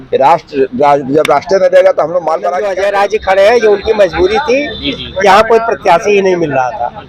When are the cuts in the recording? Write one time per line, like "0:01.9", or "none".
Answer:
0:02.6